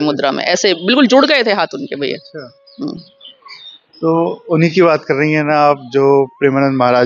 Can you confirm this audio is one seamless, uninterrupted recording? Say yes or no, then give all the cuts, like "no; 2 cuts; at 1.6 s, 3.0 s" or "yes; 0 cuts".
yes; 0 cuts